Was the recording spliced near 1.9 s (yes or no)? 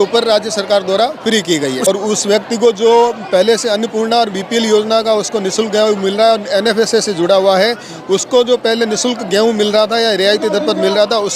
yes